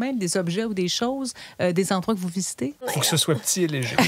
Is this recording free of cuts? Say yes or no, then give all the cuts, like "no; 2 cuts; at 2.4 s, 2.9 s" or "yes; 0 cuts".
no; 1 cut; at 2.9 s